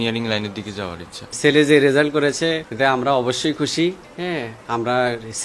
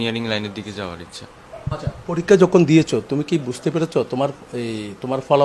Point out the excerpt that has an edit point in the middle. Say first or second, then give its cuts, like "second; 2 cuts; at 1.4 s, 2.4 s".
first; 3 cuts; at 1.3 s, 2.7 s, 4.1 s